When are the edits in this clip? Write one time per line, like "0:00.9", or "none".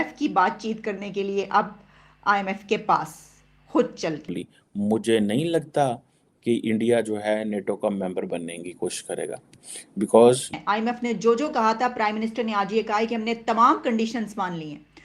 0:04.3
0:10.5